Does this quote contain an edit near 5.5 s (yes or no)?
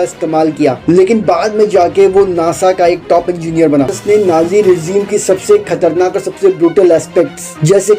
no